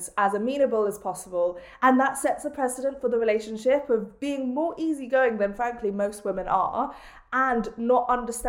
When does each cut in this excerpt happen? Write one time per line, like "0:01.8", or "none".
0:01.7